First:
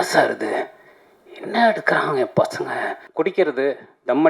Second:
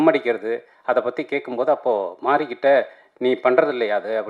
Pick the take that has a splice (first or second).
first